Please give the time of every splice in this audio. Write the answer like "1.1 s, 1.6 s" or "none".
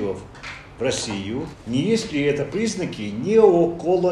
1.5 s